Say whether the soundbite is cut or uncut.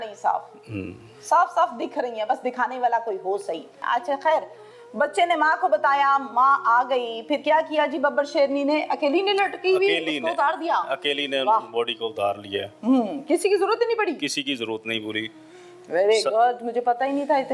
uncut